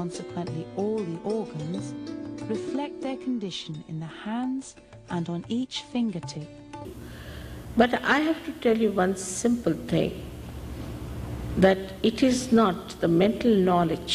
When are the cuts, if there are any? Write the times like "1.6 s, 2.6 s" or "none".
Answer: none